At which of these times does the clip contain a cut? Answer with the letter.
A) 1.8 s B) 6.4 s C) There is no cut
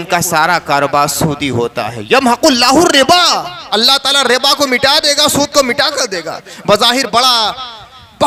C